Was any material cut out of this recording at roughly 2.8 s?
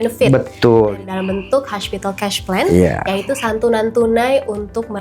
no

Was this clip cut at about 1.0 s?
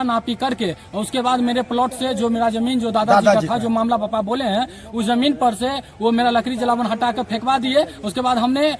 no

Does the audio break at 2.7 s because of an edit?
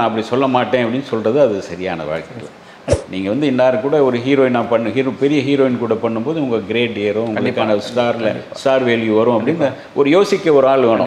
yes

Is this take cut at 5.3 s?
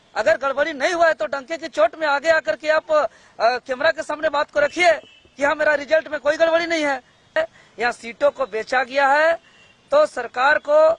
no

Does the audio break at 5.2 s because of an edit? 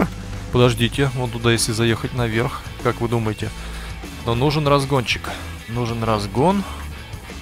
no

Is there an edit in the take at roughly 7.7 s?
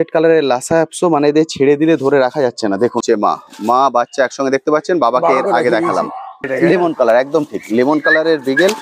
no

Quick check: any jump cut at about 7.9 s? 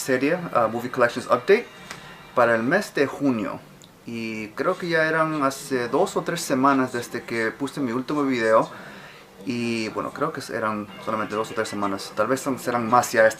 no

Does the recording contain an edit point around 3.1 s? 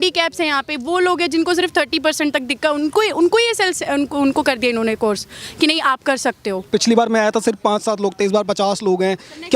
no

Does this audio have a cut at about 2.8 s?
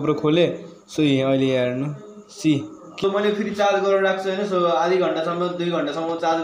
yes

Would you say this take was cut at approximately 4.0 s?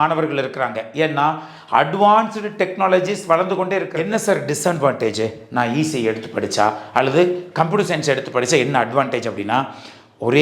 yes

